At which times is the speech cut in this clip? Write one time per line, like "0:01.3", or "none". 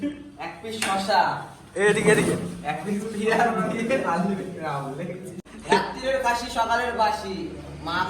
0:05.4